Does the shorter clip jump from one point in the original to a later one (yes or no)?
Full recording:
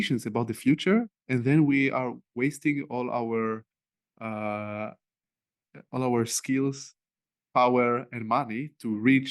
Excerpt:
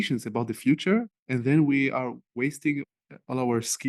yes